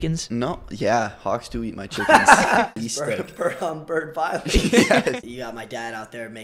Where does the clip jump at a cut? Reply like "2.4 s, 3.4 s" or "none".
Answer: 2.7 s, 5.2 s